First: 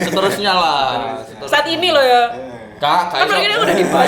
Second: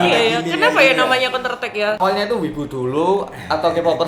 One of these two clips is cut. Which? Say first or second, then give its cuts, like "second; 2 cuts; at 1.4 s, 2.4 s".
second; 1 cut; at 2.0 s